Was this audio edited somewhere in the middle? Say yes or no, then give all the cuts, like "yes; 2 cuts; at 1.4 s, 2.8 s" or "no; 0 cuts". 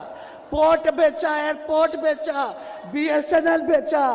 no; 0 cuts